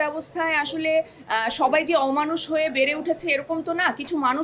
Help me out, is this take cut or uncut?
uncut